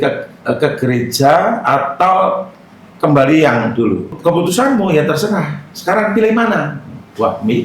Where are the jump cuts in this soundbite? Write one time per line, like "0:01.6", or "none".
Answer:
0:04.1